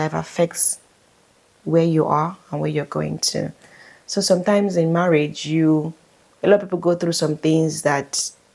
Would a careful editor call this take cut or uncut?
uncut